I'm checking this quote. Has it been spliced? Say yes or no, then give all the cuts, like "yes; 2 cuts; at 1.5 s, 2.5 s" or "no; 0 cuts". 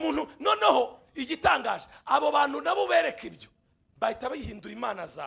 no; 0 cuts